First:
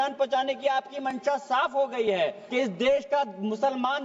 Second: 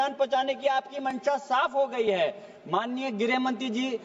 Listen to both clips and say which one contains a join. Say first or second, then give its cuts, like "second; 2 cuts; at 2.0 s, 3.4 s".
first; 1 cut; at 2.4 s